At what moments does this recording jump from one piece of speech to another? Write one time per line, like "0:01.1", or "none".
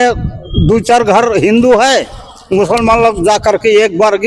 none